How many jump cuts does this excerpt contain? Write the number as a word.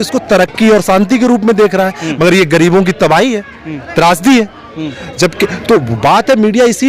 zero